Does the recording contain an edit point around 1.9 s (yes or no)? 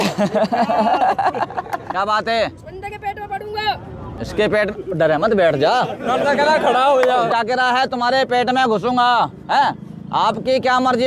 yes